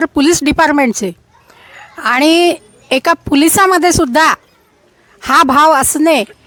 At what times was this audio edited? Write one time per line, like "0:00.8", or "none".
none